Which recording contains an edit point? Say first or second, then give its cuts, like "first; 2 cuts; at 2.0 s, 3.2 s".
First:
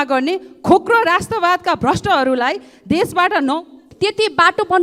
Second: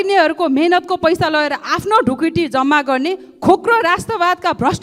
first; 1 cut; at 3.8 s